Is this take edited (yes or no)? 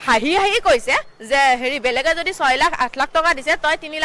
no